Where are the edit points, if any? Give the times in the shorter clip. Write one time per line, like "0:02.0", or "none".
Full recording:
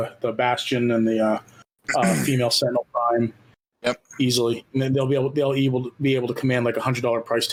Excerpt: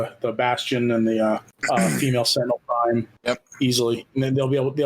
0:01.5
0:03.1

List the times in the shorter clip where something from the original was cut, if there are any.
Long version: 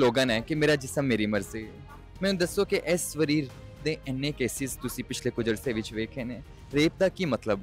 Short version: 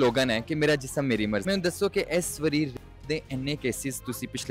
0:01.4

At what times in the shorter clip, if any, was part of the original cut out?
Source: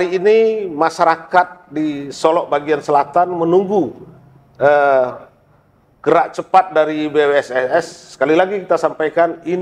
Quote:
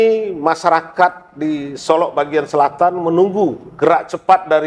0:03.6

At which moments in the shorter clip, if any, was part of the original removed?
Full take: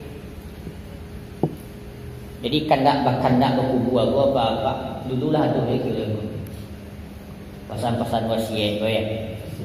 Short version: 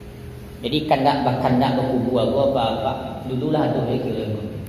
none

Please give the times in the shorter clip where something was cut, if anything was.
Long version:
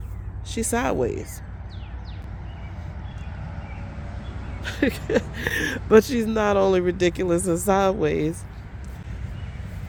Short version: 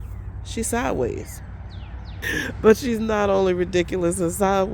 0:02.2

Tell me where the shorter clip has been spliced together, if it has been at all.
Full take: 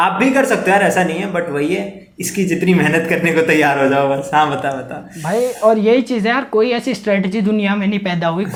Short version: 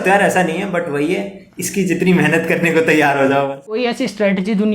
0:03.7

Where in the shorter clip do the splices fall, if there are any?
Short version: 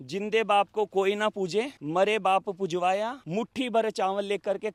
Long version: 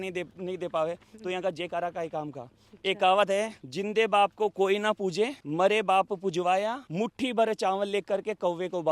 none

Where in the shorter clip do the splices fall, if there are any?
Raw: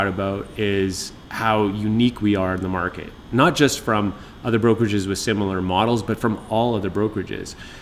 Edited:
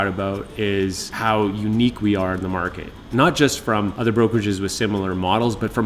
0:01.1
0:03.9

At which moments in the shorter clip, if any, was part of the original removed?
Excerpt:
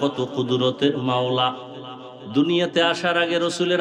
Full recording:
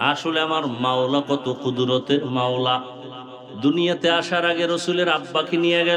none

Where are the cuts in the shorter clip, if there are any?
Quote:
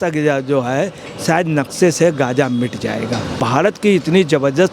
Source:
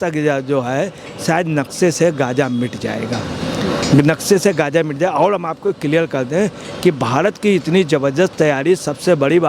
0:03.4

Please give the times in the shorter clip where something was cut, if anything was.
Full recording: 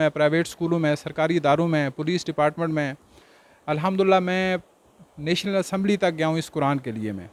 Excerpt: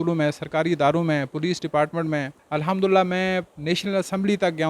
0:02.4
0:03.5

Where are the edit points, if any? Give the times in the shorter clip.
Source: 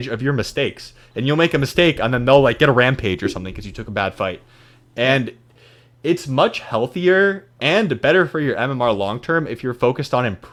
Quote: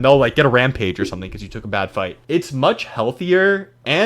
0:02.2

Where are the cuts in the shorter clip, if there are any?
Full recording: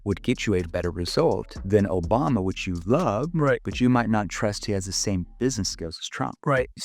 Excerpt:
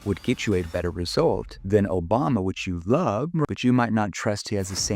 0:03.5

